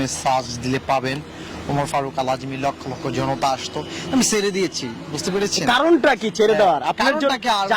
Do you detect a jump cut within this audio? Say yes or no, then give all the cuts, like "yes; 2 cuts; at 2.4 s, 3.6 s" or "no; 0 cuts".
no; 0 cuts